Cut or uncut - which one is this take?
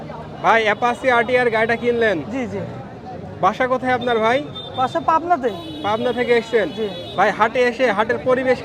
uncut